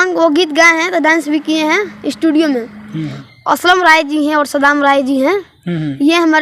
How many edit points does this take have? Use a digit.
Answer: 1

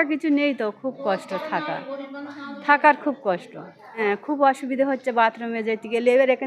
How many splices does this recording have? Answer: 1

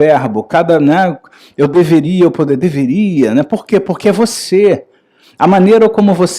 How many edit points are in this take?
0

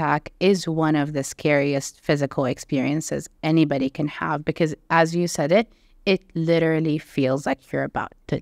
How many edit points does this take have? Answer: 0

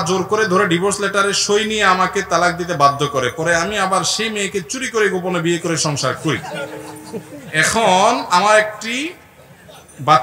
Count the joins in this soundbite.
0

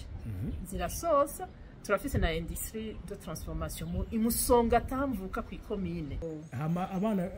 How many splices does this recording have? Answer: 1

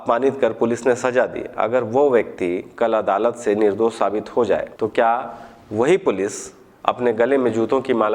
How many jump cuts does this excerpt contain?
1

